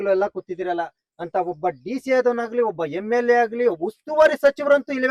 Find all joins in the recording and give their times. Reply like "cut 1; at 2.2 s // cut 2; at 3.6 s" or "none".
none